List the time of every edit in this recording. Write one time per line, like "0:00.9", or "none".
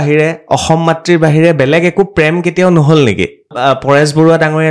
0:03.5